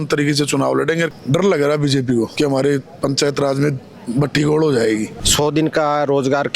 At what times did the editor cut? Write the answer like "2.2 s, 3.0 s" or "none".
1.1 s, 2.3 s, 5.2 s